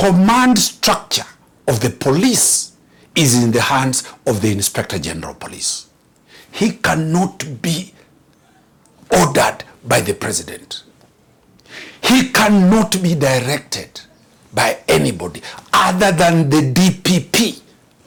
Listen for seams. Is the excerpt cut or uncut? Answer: uncut